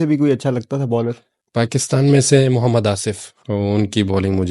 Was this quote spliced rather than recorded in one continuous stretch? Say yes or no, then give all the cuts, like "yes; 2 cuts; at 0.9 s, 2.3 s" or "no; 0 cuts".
yes; 2 cuts; at 1.3 s, 3.3 s